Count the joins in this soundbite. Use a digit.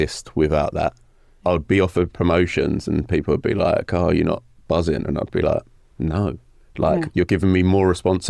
1